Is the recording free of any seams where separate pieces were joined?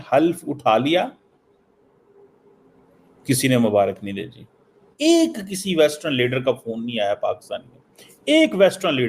no; 1 cut; at 4.8 s

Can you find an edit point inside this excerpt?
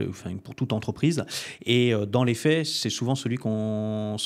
no; 0 cuts

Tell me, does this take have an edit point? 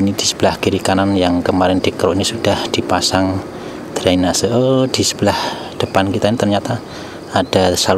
no; 0 cuts

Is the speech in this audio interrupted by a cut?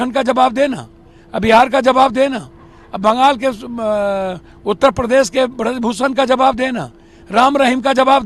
no; 0 cuts

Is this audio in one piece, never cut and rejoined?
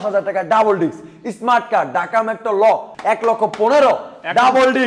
no; 1 cut; at 2.9 s

